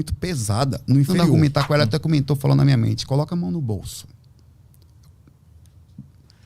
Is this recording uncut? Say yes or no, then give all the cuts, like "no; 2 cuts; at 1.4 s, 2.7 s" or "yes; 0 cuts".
no; 1 cut; at 1.1 s